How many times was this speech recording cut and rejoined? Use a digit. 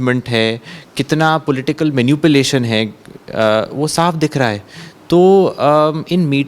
0